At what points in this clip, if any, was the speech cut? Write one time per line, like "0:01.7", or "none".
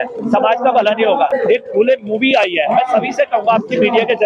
0:01.3